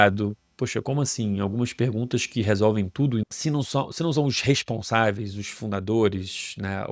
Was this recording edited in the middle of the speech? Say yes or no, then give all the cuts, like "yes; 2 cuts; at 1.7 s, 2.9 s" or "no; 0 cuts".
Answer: yes; 1 cut; at 3.2 s